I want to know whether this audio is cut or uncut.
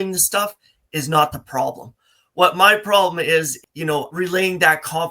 cut